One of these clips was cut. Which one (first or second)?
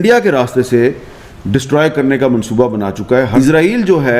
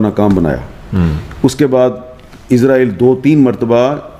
first